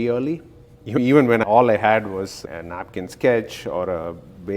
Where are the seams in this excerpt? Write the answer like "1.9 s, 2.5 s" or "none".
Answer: 1.4 s